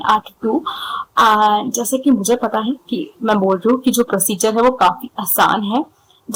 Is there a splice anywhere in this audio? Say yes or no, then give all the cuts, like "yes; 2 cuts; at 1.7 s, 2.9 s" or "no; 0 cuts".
no; 0 cuts